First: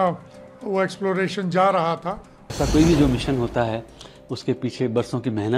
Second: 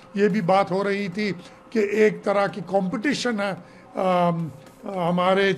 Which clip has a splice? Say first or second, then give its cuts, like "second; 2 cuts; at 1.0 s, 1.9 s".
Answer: first; 1 cut; at 2.5 s